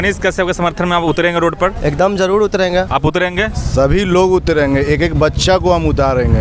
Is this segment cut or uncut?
uncut